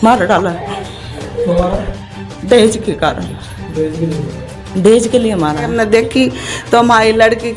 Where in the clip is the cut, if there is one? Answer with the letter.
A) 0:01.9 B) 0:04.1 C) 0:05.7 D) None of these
C